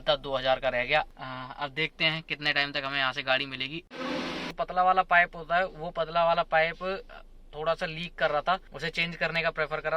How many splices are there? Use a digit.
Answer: 3